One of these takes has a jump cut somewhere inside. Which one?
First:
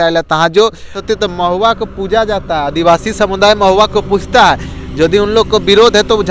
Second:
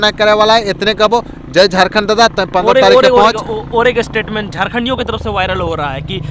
first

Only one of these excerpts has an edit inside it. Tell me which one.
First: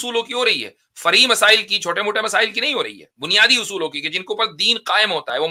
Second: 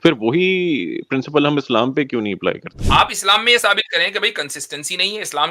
second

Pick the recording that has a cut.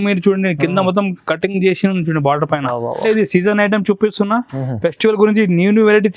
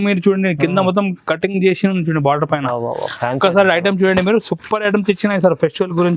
first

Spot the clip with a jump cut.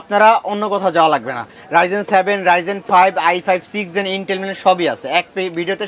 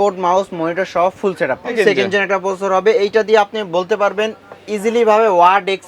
second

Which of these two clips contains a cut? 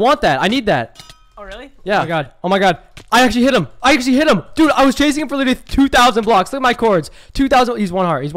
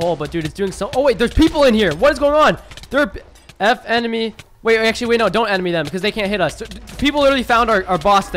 first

